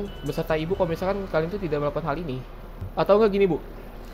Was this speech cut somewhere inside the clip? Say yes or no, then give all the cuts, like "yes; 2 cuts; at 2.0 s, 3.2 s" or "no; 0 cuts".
yes; 1 cut; at 2.8 s